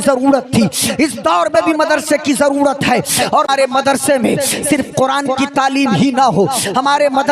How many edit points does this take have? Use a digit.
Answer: 1